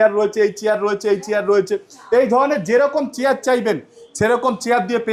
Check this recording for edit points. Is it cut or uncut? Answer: uncut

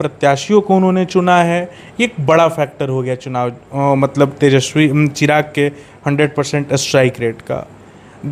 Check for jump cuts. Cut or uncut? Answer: uncut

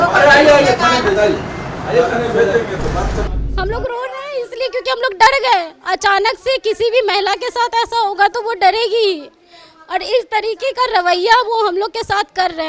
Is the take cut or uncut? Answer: cut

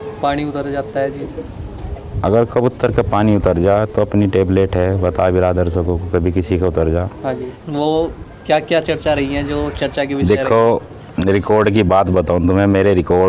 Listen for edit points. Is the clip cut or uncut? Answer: cut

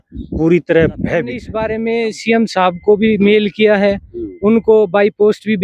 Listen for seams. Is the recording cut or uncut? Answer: cut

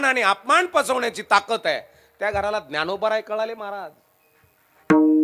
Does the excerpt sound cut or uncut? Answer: uncut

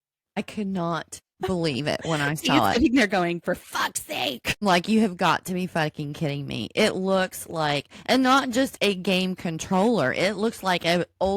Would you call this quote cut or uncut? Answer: uncut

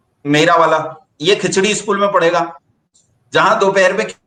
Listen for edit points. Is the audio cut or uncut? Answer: uncut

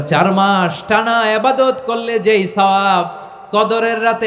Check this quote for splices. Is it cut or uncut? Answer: uncut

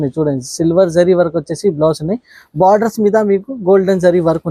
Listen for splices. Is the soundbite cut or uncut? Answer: uncut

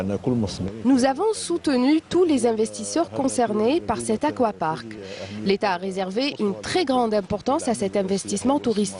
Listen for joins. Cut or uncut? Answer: uncut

